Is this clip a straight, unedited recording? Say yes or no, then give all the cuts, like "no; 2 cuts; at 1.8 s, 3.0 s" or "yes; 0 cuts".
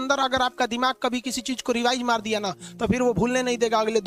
yes; 0 cuts